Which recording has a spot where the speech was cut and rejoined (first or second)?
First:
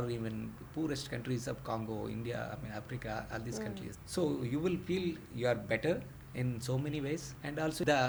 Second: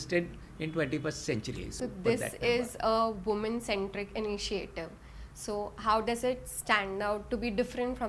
second